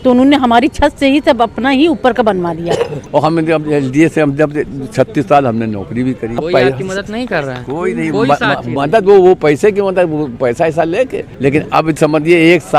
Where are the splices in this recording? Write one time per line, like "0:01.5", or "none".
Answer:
0:03.0
0:06.4
0:11.2

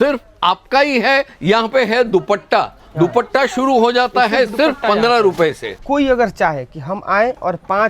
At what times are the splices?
0:01.3
0:05.7

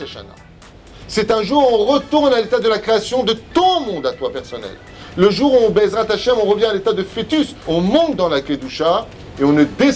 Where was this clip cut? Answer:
0:07.6

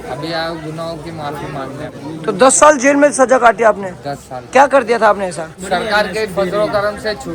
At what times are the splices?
0:02.0
0:05.6

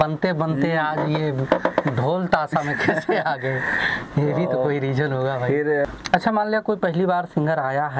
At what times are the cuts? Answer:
0:05.9

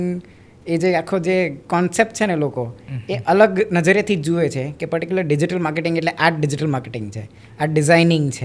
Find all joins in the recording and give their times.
none

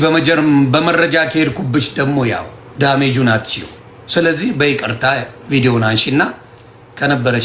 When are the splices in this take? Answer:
0:02.6

